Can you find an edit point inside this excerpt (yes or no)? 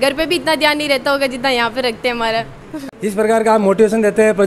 yes